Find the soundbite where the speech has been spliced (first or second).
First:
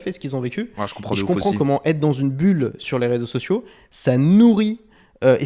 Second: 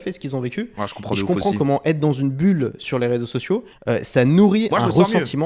second